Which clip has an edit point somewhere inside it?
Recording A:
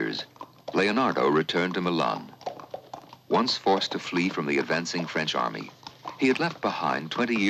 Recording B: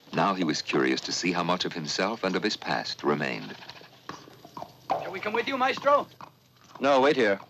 B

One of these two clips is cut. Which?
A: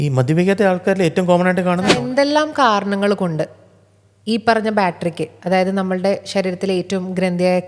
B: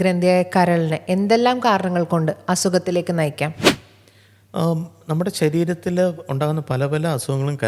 A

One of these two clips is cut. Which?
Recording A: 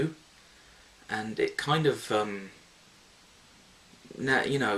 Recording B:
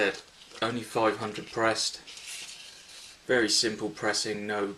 A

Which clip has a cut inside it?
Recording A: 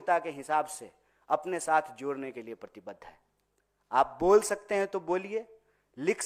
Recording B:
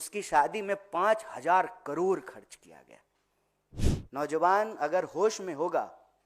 B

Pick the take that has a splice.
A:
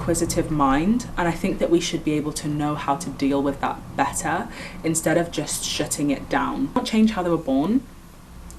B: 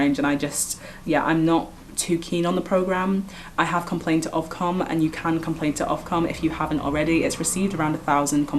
A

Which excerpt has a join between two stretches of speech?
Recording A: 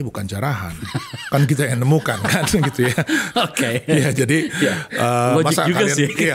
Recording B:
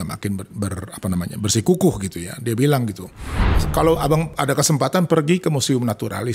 B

